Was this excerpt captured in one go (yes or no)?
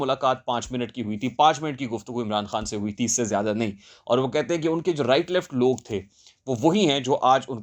yes